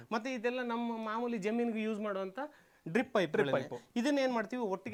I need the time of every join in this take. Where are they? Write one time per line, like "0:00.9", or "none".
none